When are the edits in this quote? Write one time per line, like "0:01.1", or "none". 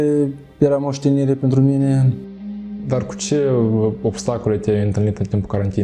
0:02.5